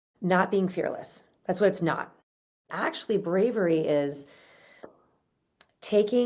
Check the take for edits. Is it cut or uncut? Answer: cut